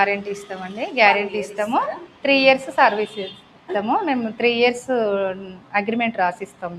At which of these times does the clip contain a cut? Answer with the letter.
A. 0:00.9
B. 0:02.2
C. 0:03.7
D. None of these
C